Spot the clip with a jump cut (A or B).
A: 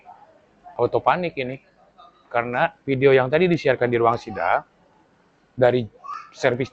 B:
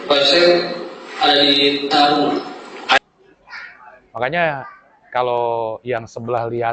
B